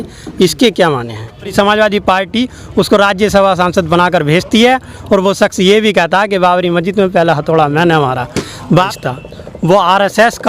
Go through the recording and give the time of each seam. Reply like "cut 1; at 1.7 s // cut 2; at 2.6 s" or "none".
cut 1; at 1.5 s // cut 2; at 8.9 s